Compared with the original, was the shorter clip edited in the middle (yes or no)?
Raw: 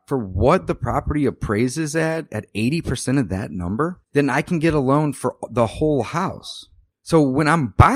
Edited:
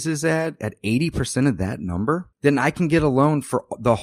no